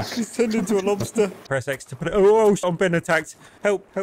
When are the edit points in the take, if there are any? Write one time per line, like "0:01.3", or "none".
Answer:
0:01.4
0:02.6